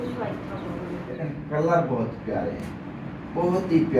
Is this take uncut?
no; 1 cut; at 1.1 s

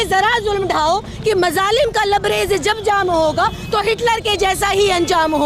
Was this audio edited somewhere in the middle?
no; 0 cuts

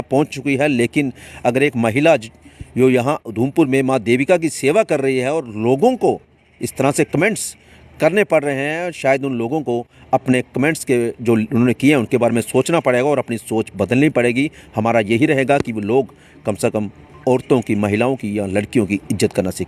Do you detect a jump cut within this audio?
no; 0 cuts

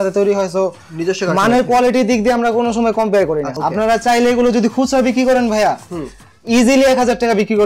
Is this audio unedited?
no; 1 cut; at 3.5 s

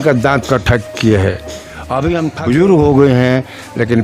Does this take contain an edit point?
yes; 1 cut; at 2.3 s

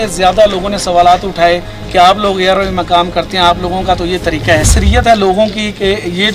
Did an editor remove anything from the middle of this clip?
yes; 1 cut; at 4.7 s

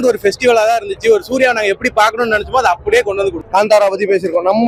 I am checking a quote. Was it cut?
no; 0 cuts

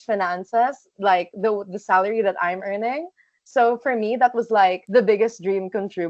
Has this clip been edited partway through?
no; 0 cuts

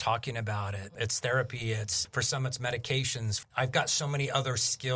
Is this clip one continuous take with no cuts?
no; 2 cuts; at 0.9 s, 3.5 s

